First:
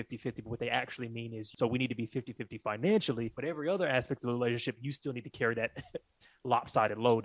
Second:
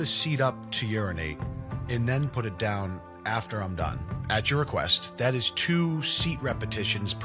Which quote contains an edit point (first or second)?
first